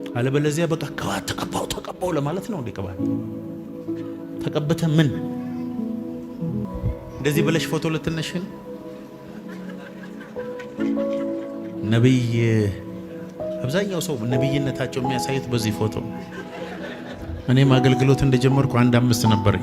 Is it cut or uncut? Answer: cut